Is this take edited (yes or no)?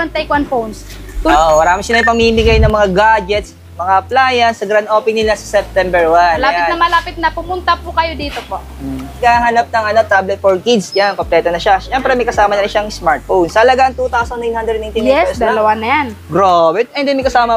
yes